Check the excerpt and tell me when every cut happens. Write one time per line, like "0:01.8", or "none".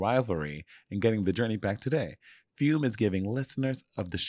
none